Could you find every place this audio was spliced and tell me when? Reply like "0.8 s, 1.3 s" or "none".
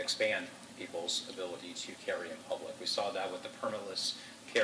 none